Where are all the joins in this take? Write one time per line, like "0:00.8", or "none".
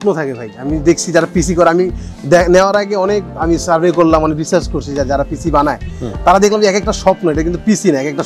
none

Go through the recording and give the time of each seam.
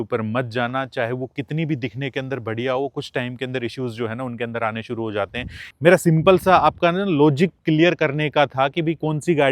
0:05.6

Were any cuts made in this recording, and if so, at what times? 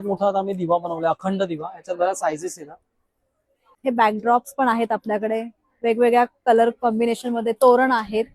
0:03.8

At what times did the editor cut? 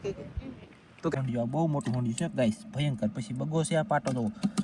0:01.1

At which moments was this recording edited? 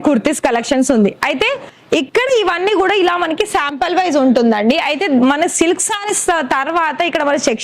none

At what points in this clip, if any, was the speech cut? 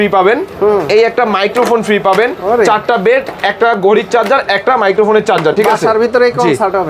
none

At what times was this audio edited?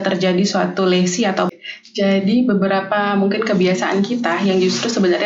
0:01.5

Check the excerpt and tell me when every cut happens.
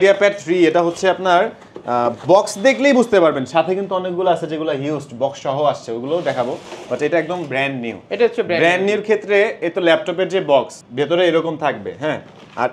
none

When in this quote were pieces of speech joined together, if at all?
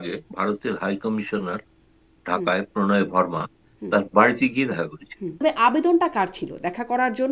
0:05.4

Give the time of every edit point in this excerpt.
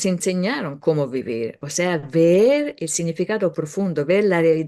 none

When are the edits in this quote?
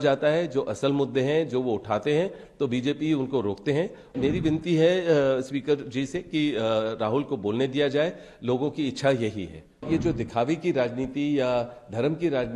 0:04.1
0:09.9

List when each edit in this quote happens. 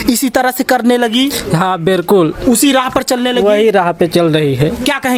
none

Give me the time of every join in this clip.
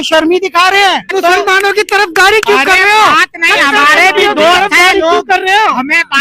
0:01.1

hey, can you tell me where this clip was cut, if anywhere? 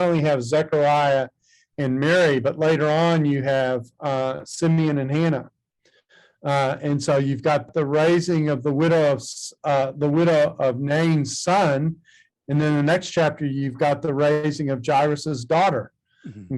0:07.7

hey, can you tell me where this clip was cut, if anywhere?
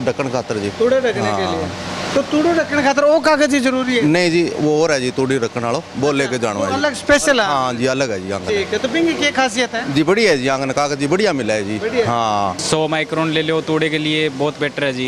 0:12.6

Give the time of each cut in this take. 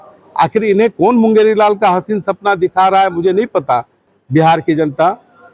0:04.1

